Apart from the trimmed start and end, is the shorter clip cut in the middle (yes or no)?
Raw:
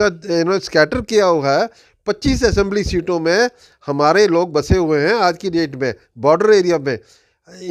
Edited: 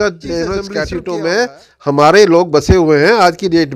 yes